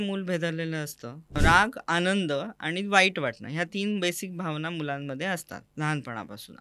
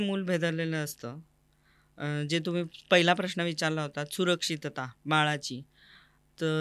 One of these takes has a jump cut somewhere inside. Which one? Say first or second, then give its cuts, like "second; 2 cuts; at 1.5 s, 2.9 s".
first; 1 cut; at 1.3 s